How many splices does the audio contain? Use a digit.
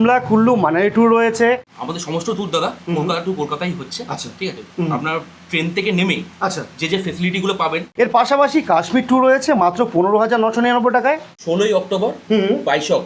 3